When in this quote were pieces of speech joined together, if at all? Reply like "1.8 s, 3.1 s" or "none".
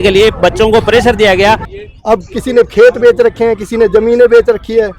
1.7 s